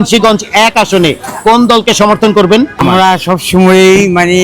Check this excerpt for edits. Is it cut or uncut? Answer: cut